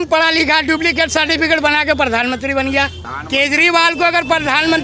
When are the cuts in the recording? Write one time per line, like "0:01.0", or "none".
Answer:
0:03.0